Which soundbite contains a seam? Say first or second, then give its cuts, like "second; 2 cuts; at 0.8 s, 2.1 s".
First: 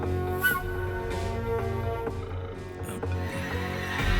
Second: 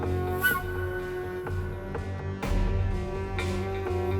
first; 1 cut; at 1.0 s